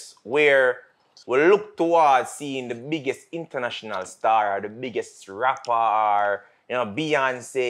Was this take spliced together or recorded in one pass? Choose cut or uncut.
uncut